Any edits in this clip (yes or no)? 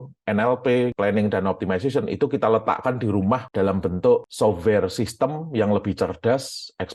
no